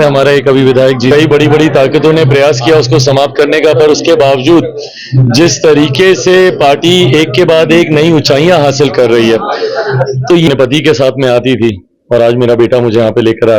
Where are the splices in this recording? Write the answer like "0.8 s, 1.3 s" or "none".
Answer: 1.1 s, 10.5 s